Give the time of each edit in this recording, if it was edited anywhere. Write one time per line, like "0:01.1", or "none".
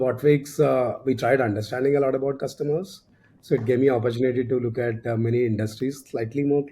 none